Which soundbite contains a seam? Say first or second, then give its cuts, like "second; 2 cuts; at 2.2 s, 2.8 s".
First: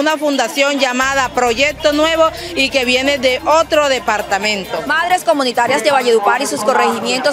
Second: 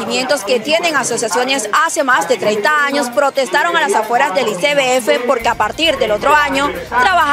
first; 1 cut; at 4.8 s